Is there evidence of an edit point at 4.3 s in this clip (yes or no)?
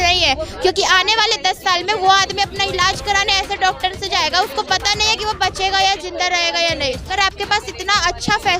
no